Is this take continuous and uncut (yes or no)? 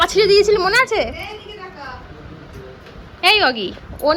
yes